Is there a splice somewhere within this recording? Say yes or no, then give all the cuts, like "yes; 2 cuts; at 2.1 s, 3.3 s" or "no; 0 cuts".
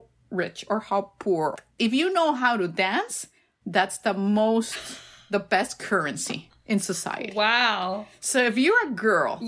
yes; 1 cut; at 1.6 s